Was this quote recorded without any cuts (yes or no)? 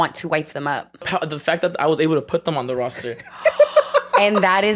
no